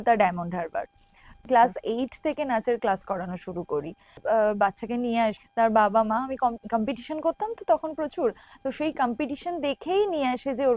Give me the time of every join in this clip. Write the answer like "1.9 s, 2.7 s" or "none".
1.4 s, 4.2 s, 5.4 s